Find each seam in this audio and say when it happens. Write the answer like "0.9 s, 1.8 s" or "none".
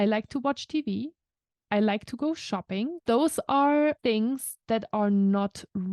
3.0 s, 4.0 s